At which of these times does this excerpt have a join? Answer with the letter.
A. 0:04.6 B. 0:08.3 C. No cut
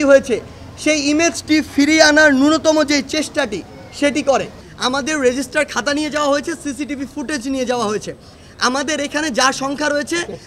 A